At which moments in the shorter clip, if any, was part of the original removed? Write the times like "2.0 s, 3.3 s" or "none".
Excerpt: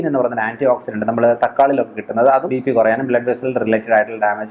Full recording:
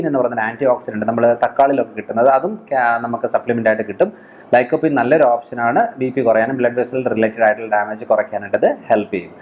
2.5 s